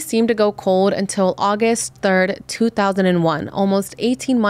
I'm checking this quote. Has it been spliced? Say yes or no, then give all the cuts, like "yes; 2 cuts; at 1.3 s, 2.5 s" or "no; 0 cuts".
no; 0 cuts